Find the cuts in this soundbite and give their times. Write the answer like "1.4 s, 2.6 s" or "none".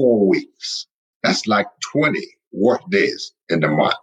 1.0 s